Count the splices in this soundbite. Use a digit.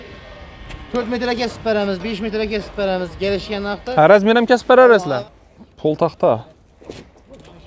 1